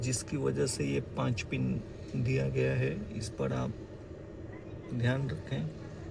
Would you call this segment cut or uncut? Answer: uncut